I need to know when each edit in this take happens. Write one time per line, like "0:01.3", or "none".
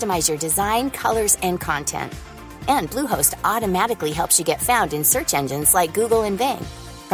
none

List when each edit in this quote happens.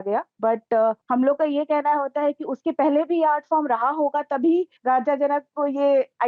0:00.8
0:04.7

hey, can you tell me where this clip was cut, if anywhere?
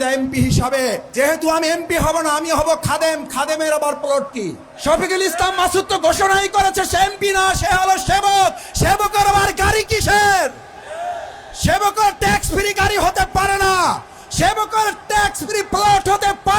0:01.0
0:04.7

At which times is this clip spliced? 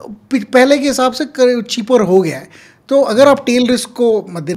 none

